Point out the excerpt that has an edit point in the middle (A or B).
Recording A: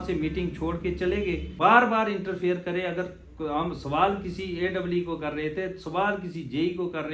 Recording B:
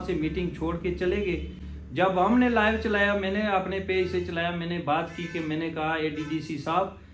A